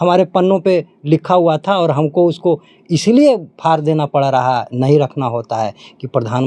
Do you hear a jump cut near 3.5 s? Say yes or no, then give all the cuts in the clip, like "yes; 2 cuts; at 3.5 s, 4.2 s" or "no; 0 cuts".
no; 0 cuts